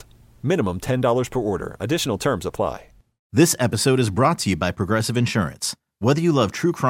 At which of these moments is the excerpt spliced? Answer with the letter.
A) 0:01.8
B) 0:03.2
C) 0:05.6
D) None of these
B